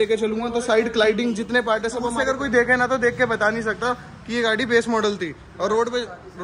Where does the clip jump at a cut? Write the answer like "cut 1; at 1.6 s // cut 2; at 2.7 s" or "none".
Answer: cut 1; at 2.2 s